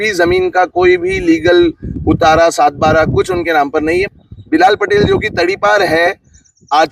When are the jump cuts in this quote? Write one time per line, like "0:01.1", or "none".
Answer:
0:04.1